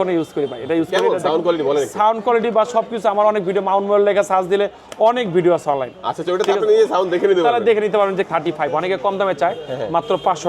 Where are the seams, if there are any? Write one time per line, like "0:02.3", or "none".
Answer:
0:08.3